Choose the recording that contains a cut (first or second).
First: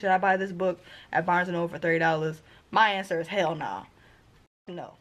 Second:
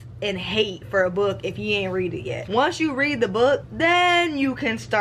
second